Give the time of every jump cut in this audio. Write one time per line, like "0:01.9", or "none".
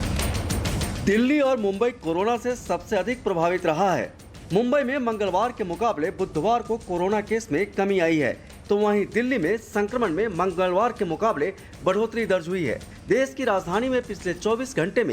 0:00.9